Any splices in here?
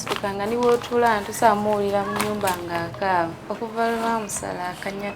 yes; 1 cut; at 3.4 s

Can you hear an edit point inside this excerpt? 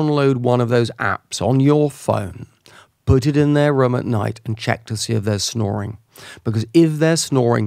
no; 0 cuts

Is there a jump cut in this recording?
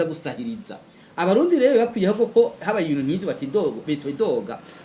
yes; 1 cut; at 1.0 s

